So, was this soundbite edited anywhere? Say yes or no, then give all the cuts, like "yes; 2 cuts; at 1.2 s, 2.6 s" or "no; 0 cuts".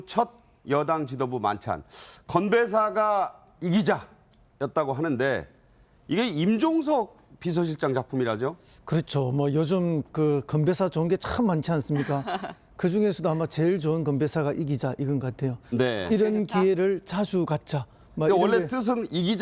no; 0 cuts